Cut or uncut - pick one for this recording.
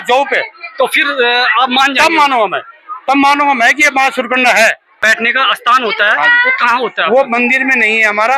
cut